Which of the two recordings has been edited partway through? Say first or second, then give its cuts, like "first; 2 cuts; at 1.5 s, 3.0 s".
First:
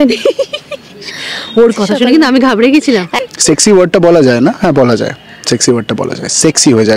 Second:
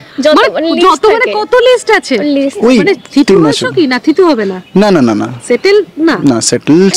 first; 1 cut; at 3.1 s